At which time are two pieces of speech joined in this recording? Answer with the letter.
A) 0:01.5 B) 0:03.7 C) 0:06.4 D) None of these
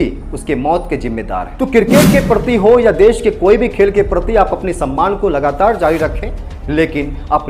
A